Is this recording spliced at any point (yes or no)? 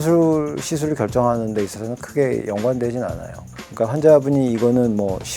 yes